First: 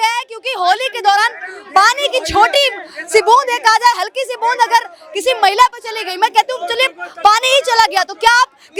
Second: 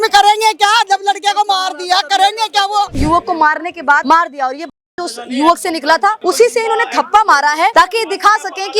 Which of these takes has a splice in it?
second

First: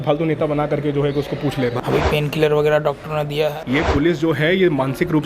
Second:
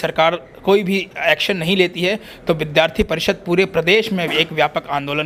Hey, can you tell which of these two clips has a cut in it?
first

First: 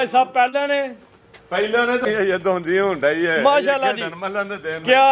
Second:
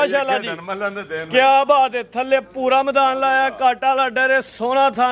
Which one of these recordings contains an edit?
first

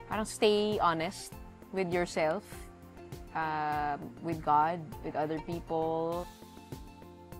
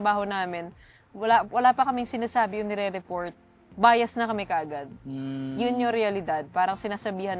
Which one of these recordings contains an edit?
first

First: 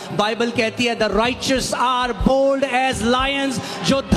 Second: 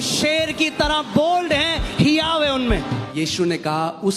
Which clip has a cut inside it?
second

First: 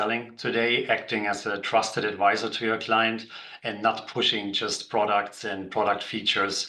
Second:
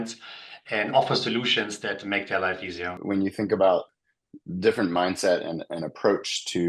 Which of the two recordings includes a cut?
second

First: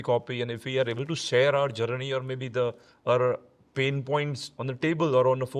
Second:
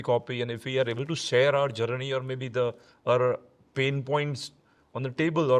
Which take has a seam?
first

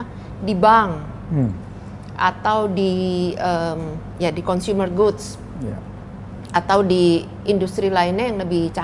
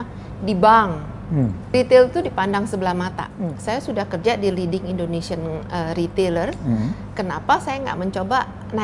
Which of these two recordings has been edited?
second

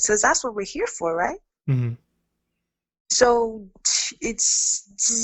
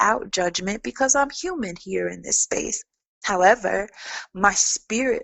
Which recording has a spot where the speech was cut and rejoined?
second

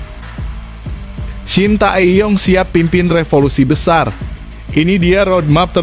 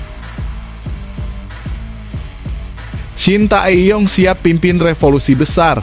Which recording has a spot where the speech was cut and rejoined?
first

